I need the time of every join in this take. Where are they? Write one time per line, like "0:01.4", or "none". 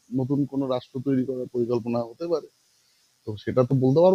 none